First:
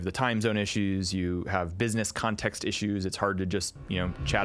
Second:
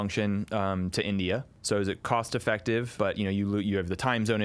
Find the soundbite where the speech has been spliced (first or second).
second